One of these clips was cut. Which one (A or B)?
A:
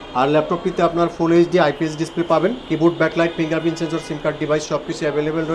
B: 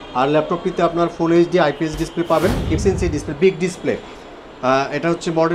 B